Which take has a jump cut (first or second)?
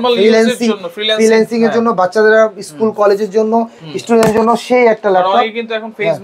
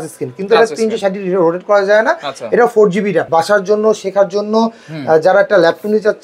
second